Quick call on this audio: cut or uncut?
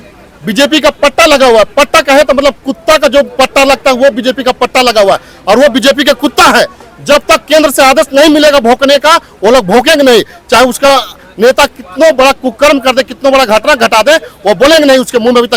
uncut